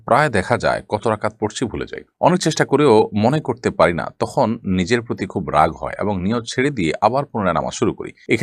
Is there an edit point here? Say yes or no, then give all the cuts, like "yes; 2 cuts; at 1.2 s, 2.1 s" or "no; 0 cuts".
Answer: no; 0 cuts